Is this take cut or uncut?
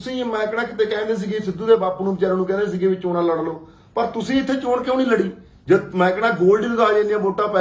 uncut